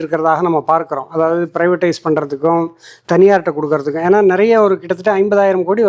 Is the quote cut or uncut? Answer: uncut